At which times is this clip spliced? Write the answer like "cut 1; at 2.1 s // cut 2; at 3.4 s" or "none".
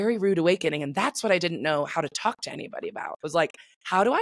cut 1; at 3.1 s